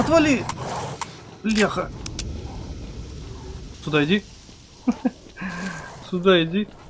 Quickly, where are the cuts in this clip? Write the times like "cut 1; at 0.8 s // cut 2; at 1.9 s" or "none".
cut 1; at 3.7 s